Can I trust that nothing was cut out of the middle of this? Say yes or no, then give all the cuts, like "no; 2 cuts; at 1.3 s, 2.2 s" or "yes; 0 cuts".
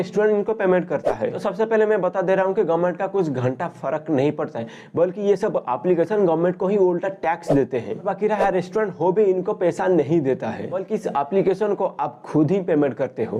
yes; 0 cuts